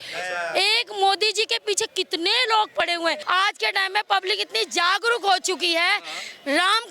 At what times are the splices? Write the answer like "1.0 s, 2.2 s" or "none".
3.2 s